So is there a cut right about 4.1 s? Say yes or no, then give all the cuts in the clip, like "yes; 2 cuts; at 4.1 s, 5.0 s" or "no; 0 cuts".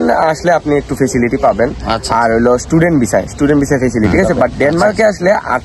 yes; 1 cut; at 4.1 s